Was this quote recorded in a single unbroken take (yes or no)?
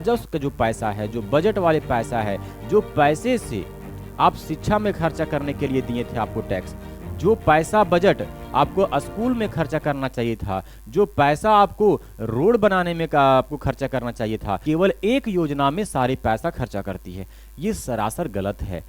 no